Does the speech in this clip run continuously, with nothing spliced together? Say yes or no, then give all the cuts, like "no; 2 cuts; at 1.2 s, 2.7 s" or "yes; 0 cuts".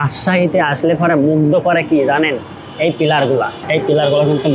no; 1 cut; at 3.6 s